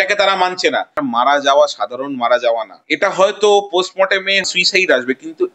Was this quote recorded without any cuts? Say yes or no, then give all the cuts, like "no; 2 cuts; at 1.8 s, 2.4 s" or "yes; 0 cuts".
no; 3 cuts; at 0.9 s, 2.8 s, 4.5 s